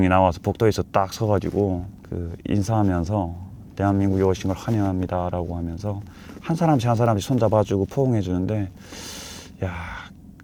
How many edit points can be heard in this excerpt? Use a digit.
0